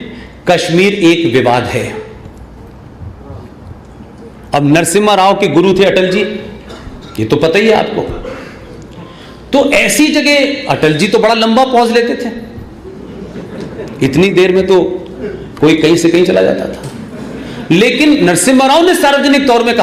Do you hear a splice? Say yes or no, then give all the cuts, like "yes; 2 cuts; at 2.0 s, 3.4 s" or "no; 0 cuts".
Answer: no; 0 cuts